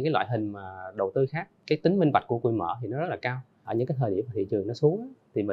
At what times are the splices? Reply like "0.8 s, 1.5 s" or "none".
1.5 s, 3.7 s